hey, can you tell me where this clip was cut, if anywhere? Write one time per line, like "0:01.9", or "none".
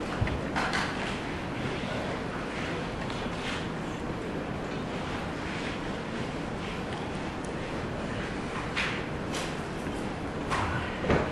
none